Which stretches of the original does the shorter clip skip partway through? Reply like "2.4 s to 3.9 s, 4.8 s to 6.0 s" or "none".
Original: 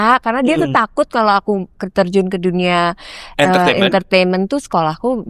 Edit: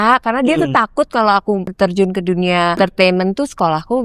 1.7 s to 1.8 s, 2.9 s to 3.9 s